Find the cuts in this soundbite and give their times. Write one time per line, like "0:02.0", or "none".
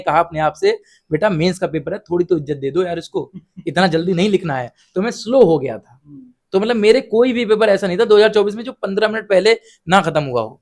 none